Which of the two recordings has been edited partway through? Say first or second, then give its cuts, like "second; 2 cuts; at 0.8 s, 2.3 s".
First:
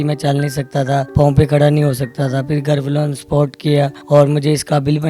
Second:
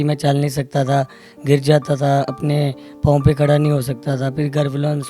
first; 2 cuts; at 1.1 s, 4.0 s